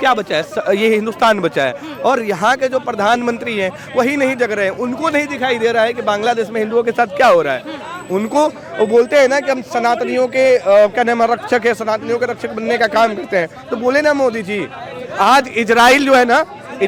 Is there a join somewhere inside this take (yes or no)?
no